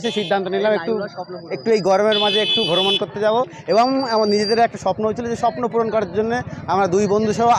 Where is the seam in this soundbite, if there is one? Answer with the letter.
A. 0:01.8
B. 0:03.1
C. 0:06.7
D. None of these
D